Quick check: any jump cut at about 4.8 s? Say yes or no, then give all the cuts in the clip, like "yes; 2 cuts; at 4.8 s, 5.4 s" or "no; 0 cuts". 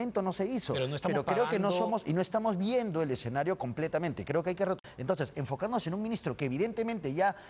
yes; 1 cut; at 4.8 s